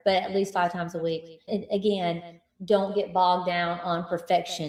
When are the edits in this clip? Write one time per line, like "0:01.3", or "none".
none